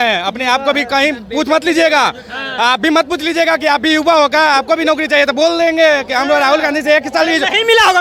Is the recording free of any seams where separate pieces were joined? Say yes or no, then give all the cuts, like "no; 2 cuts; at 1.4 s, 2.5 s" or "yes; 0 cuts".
yes; 0 cuts